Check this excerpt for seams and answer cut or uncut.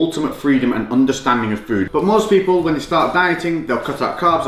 cut